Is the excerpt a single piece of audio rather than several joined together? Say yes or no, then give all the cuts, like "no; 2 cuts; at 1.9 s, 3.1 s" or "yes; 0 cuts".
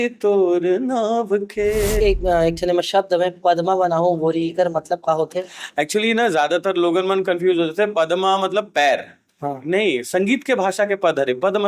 no; 1 cut; at 2.0 s